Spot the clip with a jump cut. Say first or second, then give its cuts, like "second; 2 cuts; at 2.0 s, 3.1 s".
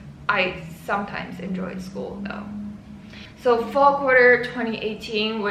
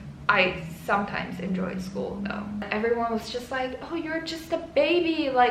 second; 1 cut; at 2.6 s